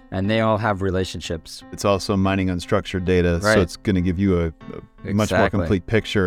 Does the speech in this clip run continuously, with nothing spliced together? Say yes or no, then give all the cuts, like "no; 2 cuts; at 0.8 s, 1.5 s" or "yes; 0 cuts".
no; 1 cut; at 1.8 s